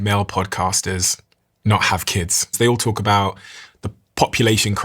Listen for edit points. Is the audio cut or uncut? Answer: cut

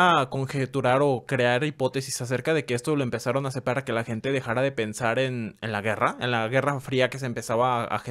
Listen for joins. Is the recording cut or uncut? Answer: uncut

